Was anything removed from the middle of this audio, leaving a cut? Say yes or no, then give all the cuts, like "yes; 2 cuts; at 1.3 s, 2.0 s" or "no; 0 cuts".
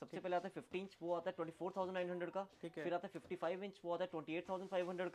no; 0 cuts